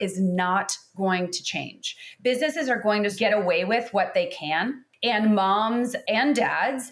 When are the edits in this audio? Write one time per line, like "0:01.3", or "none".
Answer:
0:03.2
0:04.9
0:06.0

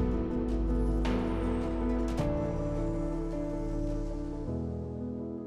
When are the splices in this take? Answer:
none

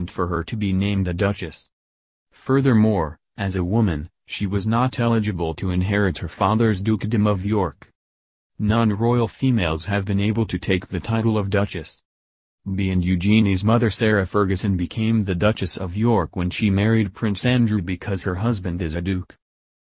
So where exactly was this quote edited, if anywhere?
0:12.8

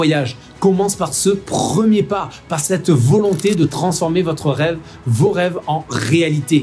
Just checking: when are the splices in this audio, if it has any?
none

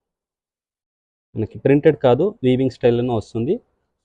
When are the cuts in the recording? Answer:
none

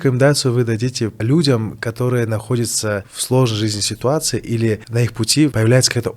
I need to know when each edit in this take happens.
0:01.2
0:03.1
0:05.0

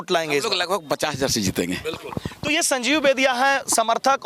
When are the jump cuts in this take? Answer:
none

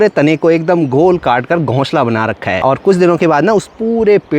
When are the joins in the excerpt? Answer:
0:02.6

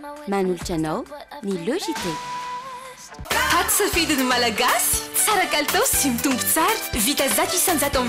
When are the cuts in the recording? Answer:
0:03.1

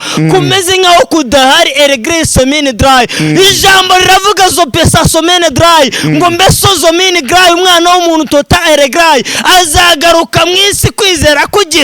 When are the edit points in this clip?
none

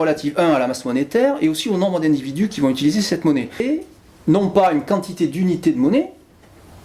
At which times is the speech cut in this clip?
0:03.6

